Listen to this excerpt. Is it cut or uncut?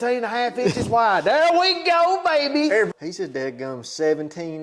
cut